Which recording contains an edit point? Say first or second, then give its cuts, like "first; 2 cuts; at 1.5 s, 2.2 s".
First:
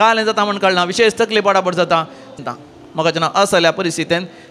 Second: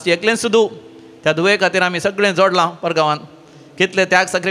first; 1 cut; at 2.3 s